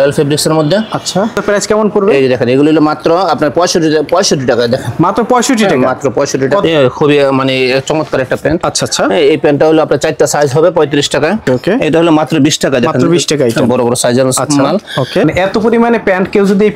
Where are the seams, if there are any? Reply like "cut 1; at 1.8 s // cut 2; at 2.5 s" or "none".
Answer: cut 1; at 1.4 s // cut 2; at 6.6 s // cut 3; at 11.4 s // cut 4; at 15.3 s

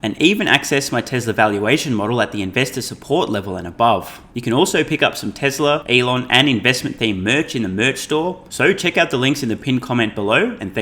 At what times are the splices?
cut 1; at 4.2 s // cut 2; at 5.8 s // cut 3; at 8.4 s

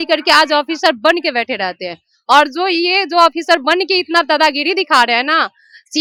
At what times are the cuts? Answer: none

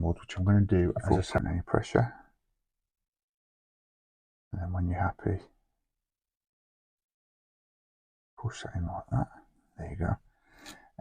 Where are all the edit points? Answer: cut 1; at 1.0 s

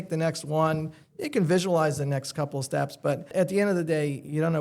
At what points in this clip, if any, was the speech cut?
cut 1; at 3.3 s

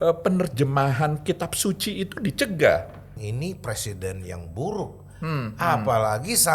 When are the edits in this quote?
cut 1; at 3.1 s

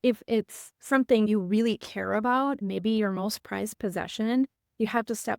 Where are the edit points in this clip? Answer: cut 1; at 1.3 s // cut 2; at 2.6 s

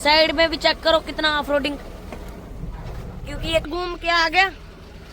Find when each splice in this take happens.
cut 1; at 3.7 s

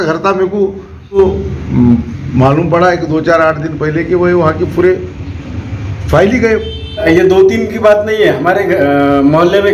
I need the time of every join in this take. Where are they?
cut 1; at 1.2 s // cut 2; at 7.0 s

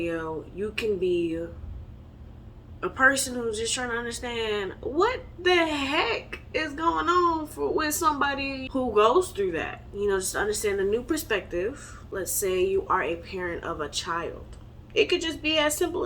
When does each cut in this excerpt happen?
cut 1; at 8.6 s // cut 2; at 12.2 s

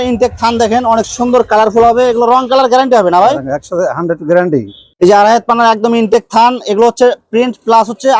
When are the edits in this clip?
cut 1; at 4.9 s

